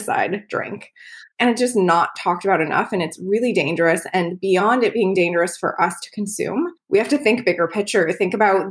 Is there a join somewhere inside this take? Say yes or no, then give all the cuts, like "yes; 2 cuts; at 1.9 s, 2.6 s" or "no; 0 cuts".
yes; 2 cuts; at 1.3 s, 6.8 s